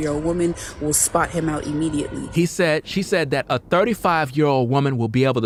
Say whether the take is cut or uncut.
uncut